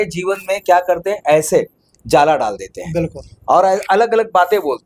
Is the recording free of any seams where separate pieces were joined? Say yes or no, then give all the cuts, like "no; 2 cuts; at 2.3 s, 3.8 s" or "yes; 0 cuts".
yes; 0 cuts